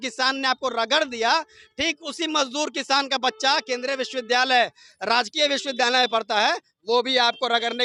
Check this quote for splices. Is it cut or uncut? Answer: uncut